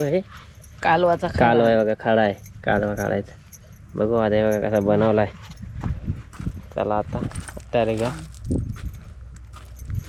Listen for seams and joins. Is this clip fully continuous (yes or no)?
yes